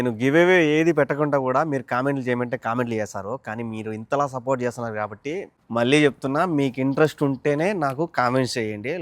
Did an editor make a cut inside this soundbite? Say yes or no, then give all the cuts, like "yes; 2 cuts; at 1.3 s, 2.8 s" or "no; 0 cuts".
yes; 1 cut; at 5.5 s